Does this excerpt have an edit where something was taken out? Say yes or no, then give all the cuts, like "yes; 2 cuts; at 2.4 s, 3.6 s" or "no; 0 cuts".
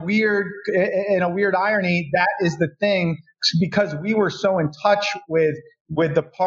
no; 0 cuts